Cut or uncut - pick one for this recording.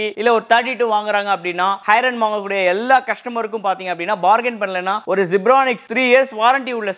uncut